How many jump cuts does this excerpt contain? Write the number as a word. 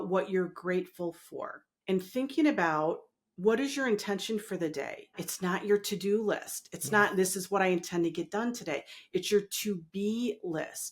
two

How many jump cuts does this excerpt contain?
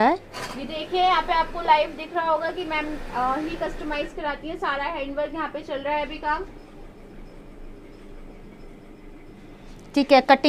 zero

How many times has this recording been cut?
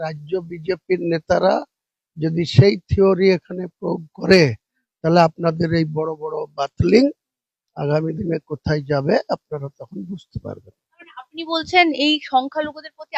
zero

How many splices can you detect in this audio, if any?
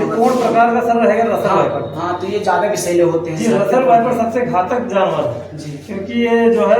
zero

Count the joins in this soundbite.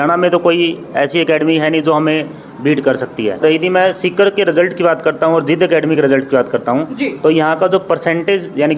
one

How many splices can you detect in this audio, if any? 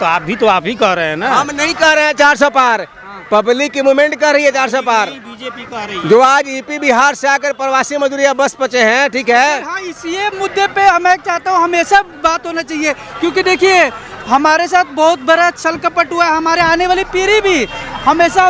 zero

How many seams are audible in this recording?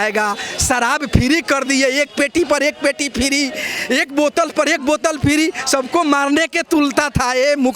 zero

